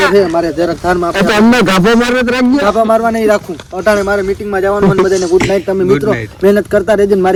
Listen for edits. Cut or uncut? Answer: uncut